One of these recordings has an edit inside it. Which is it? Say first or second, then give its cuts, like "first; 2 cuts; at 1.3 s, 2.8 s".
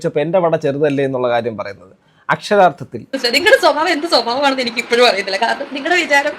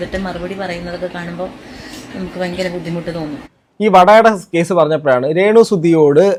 first; 1 cut; at 3.1 s